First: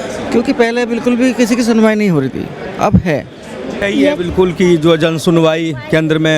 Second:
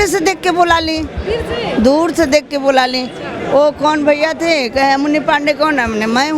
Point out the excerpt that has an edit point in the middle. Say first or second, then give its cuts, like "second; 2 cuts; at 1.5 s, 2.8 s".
first; 1 cut; at 3.8 s